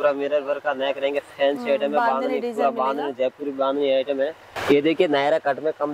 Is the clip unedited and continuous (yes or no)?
no